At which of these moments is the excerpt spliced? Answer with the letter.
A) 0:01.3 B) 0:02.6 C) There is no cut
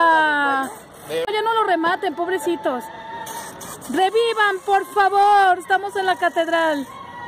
A